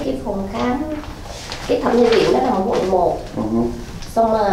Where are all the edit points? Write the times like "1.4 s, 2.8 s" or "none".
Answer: none